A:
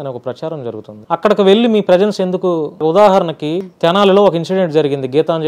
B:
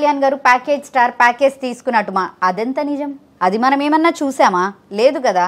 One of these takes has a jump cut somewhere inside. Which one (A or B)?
A